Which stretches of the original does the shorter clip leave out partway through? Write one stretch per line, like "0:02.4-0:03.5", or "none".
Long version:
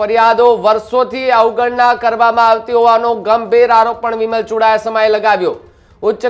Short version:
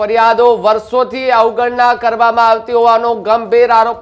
none

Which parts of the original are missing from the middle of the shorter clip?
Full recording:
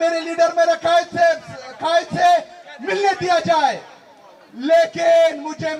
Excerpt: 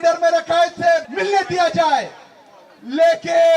0:01.5-0:02.8

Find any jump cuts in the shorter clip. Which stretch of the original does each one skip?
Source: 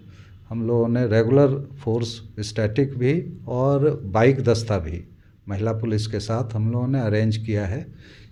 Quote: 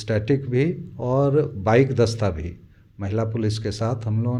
none

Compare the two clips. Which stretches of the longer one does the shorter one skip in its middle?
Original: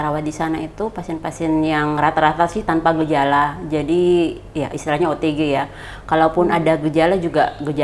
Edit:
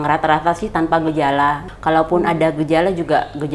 0:03.6-0:05.9

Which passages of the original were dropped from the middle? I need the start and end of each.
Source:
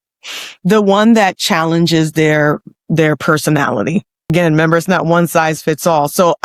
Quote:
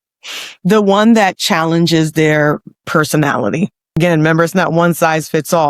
0:02.9-0:03.2

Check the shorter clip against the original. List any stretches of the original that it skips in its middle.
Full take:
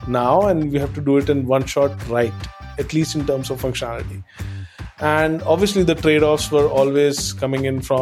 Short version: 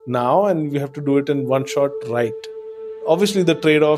0:02.9-0:05.3

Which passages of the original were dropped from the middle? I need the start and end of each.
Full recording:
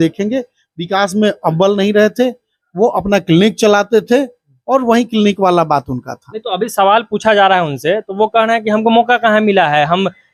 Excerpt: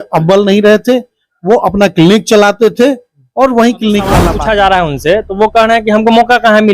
0:05.6-0:07.1

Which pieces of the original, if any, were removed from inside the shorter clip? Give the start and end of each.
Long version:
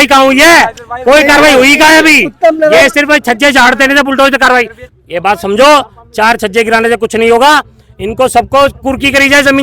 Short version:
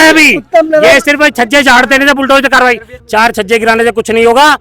0:04.8-0:06.0

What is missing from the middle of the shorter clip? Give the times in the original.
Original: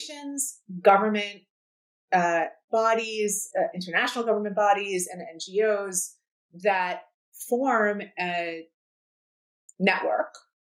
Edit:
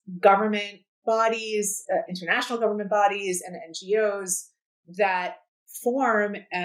0:01.5-0:02.6

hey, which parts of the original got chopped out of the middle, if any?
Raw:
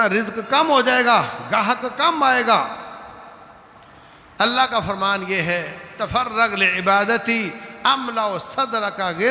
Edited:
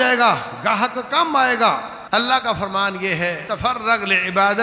0:02.8-0:04.2
0:05.7-0:05.9

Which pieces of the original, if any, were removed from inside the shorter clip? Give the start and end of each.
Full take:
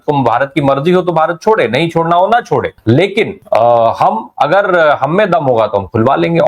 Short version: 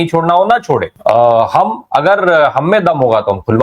0:02.7-0:03.4

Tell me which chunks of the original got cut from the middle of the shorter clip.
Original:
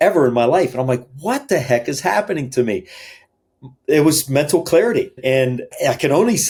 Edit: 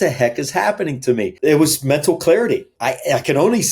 0:02.8-0:03.8
0:05.2-0:05.5

